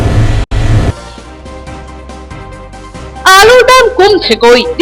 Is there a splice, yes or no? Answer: no